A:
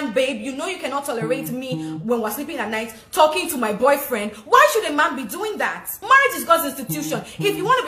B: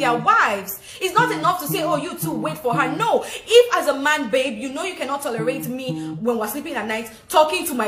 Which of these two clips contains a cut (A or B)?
A